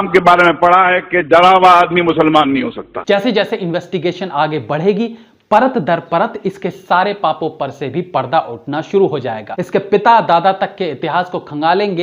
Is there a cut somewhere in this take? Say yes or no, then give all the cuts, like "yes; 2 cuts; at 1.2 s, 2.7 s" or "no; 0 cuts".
yes; 2 cuts; at 2.9 s, 9.5 s